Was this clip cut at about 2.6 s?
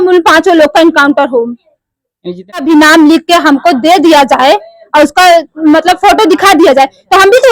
yes; 1 cut; at 2.6 s

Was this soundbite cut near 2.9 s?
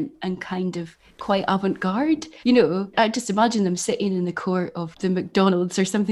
yes; 3 cuts; at 2.3 s, 2.9 s, 4.8 s

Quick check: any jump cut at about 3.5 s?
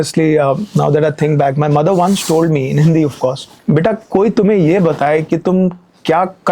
yes; 1 cut; at 3.5 s

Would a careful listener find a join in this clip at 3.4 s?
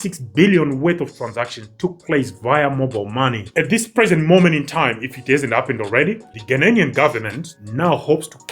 yes; 1 cut; at 3.4 s

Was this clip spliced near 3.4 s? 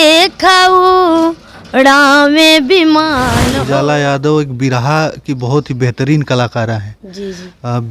yes; 1 cut; at 3.4 s

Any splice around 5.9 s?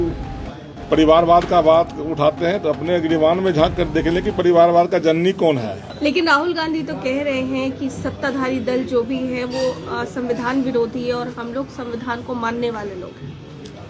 yes; 1 cut; at 5.9 s

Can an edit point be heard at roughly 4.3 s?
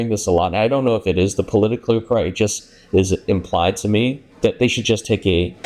yes; 1 cut; at 4.3 s

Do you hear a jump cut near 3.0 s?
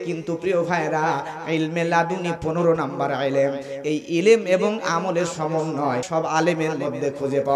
no; 1 cut; at 6.1 s

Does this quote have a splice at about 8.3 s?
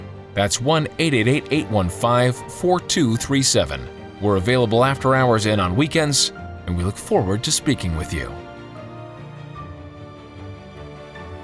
yes; 1 cut; at 8.3 s

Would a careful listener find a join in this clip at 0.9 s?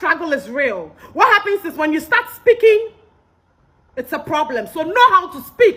no; 0 cuts

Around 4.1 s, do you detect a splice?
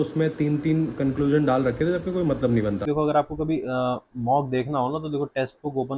no; 1 cut; at 2.8 s

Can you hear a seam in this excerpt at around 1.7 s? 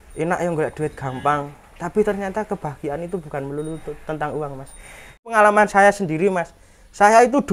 no; 1 cut; at 5.3 s

